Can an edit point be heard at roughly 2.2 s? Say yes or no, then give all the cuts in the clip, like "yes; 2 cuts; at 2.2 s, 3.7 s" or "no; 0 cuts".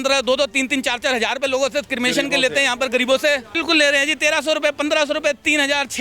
no; 1 cut; at 3.5 s